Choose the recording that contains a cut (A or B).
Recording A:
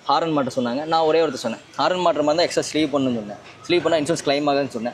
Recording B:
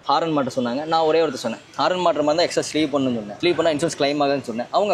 B